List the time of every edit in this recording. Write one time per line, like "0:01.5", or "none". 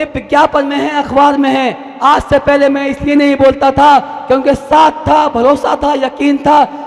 none

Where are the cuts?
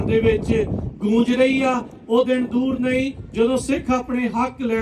none

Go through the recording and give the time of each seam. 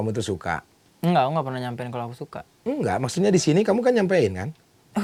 none

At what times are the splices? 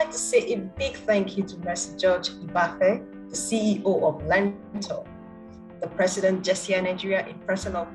none

